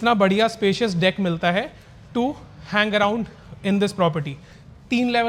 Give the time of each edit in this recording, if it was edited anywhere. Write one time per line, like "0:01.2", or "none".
none